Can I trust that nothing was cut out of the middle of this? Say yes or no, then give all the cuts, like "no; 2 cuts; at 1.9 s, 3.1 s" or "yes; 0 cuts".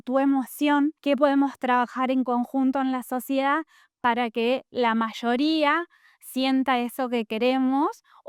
yes; 0 cuts